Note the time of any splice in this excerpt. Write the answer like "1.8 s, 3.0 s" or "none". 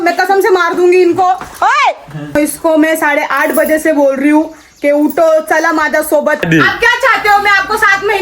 2.4 s, 6.4 s